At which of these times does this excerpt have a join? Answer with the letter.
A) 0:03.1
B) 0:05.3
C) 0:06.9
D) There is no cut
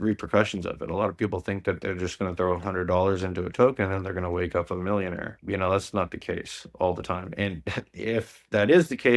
B